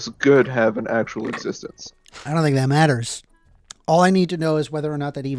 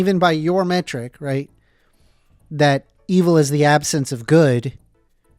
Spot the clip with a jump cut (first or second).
second